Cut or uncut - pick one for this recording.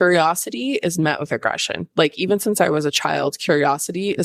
cut